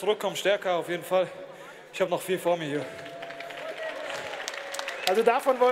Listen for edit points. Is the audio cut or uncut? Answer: uncut